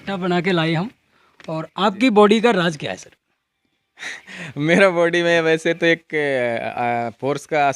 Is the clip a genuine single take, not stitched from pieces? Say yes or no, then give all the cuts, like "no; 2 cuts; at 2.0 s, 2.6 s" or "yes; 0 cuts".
no; 1 cut; at 1.6 s